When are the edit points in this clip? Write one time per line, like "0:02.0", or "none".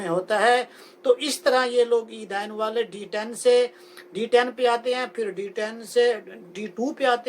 none